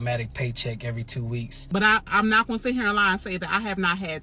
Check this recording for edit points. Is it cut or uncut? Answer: cut